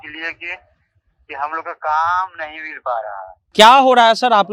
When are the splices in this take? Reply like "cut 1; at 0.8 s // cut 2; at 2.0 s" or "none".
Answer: cut 1; at 3.5 s